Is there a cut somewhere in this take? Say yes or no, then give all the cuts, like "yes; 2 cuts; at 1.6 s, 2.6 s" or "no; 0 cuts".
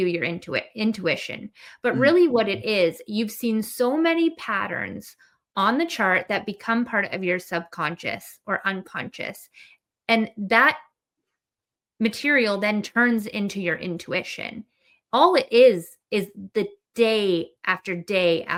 no; 0 cuts